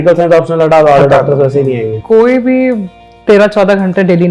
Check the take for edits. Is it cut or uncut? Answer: cut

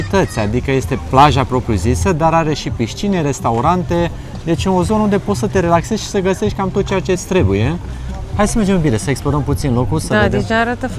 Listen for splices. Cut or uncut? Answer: uncut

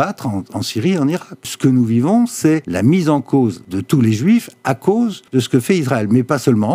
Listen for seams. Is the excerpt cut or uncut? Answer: cut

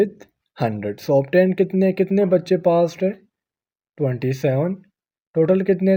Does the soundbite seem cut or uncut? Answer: uncut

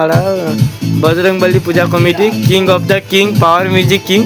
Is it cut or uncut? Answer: uncut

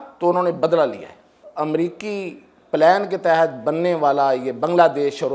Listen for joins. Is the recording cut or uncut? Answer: cut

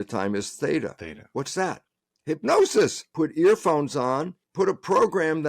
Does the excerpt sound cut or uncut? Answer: cut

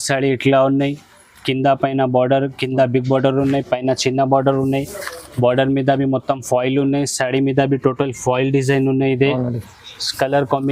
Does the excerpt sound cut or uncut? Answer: uncut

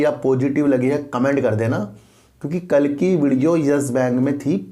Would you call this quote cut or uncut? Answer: uncut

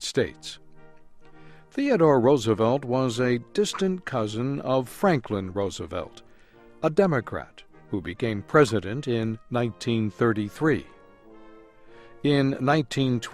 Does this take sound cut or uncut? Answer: cut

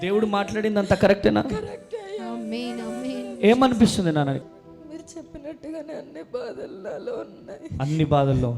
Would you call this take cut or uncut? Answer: cut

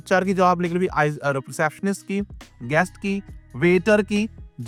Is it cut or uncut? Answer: uncut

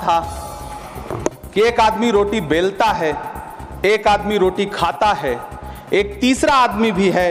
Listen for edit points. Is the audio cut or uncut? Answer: uncut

